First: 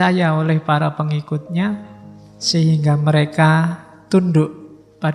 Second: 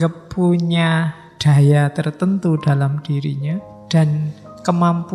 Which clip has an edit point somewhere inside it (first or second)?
second